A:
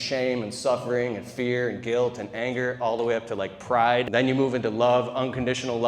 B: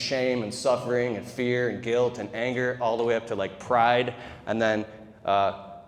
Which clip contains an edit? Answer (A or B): A